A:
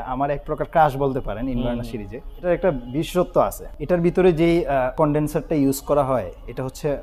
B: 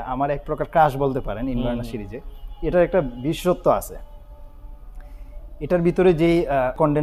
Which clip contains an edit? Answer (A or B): A